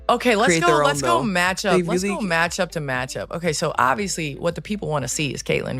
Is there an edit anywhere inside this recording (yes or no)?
no